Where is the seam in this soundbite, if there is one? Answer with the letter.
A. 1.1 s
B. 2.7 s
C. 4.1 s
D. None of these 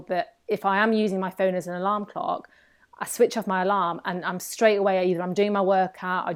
D